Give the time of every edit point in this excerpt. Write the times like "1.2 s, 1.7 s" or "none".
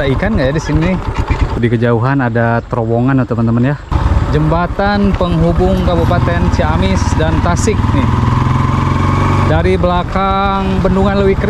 1.5 s, 4.0 s